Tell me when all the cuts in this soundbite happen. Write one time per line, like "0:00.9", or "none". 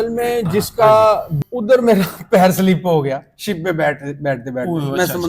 0:01.3